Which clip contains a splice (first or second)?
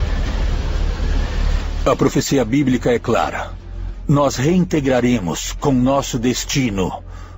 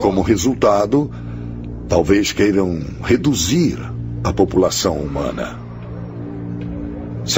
first